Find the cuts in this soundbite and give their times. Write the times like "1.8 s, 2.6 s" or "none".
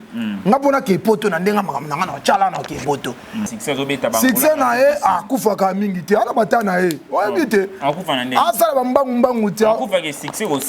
3.5 s